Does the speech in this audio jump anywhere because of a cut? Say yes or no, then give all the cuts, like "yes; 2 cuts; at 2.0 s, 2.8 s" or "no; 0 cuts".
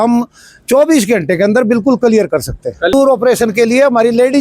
yes; 1 cut; at 2.9 s